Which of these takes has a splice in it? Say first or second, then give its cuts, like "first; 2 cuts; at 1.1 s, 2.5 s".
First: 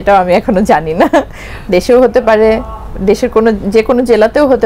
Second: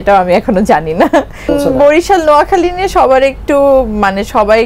second; 1 cut; at 1.5 s